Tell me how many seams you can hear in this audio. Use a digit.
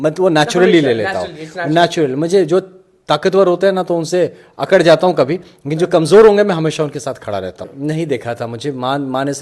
1